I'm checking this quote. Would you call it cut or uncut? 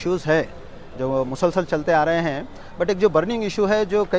uncut